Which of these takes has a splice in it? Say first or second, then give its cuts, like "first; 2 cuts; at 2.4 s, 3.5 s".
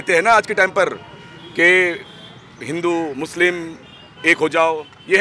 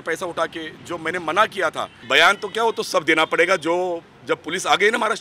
second; 1 cut; at 1.9 s